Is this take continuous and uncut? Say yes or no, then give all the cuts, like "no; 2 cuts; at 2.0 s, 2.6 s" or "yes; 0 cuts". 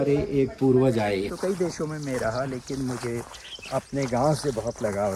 no; 1 cut; at 1.3 s